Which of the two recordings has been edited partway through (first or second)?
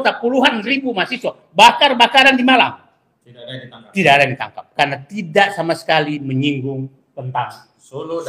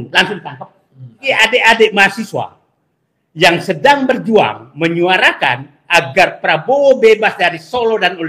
second